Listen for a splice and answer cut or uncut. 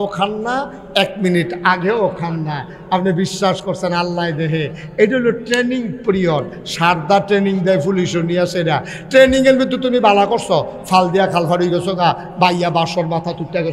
uncut